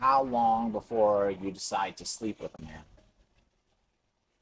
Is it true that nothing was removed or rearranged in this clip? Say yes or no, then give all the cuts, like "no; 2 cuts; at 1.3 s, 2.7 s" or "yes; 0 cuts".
yes; 0 cuts